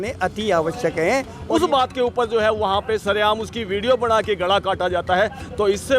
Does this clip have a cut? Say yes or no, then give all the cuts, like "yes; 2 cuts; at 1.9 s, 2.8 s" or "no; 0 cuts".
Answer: yes; 1 cut; at 1.4 s